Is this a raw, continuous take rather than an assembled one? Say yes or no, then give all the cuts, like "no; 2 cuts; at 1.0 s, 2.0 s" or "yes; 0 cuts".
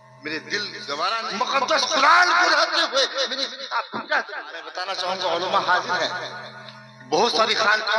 no; 2 cuts; at 1.2 s, 4.7 s